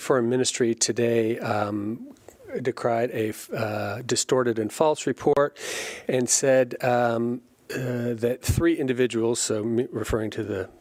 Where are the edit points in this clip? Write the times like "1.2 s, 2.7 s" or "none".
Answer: none